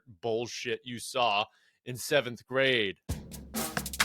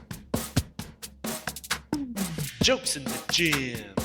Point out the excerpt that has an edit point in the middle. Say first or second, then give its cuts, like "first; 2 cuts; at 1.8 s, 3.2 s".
first; 1 cut; at 3.1 s